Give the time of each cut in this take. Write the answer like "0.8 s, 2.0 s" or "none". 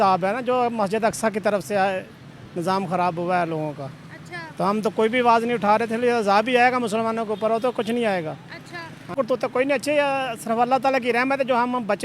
9.1 s